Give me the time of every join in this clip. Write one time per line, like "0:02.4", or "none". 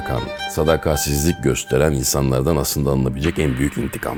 none